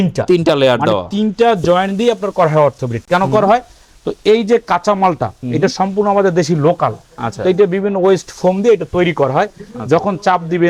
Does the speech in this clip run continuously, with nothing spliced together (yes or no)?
yes